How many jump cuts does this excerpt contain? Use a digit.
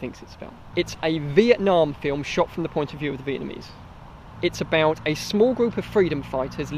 2